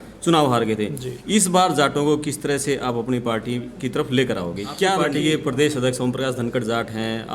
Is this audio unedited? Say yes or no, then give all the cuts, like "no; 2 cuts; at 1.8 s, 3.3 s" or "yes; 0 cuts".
no; 1 cut; at 4.8 s